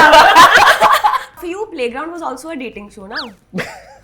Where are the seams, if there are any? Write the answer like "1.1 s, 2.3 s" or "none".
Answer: 1.4 s